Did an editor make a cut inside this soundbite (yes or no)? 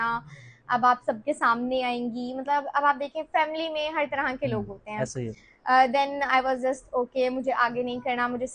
no